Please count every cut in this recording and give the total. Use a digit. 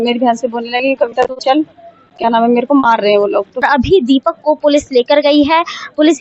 1